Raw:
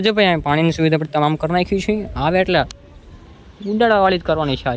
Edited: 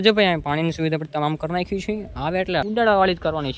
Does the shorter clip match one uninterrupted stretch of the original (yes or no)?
no